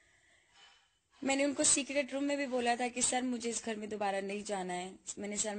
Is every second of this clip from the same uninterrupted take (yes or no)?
no